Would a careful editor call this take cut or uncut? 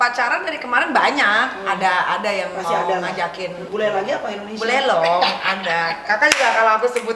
cut